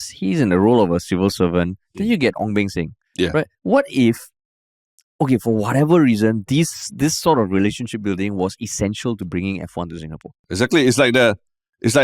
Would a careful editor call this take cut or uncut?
cut